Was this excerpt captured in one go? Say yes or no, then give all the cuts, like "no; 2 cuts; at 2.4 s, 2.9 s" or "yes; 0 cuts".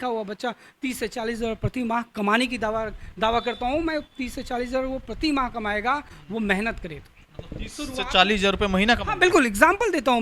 yes; 0 cuts